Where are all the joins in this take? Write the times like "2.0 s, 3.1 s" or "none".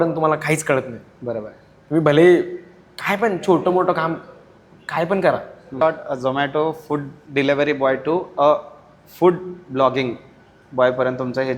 5.8 s, 7.2 s